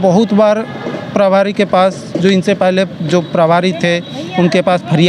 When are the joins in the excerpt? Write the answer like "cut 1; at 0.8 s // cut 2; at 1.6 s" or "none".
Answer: none